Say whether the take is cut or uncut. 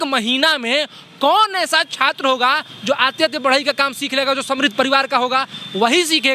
uncut